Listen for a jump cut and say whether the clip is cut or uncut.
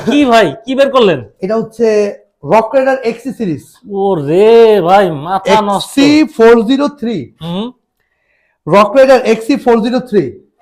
uncut